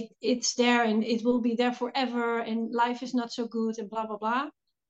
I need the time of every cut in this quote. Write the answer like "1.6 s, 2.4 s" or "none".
none